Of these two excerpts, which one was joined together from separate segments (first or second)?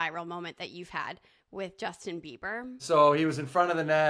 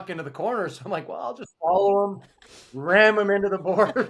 first